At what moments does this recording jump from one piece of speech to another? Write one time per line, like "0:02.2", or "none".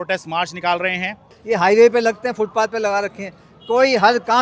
0:01.3